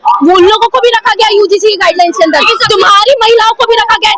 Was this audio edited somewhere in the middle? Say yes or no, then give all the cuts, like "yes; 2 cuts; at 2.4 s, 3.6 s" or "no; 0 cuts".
no; 0 cuts